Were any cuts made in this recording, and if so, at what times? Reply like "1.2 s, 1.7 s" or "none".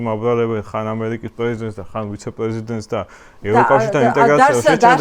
none